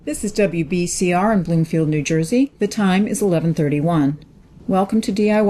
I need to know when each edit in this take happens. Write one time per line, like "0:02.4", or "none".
0:03.5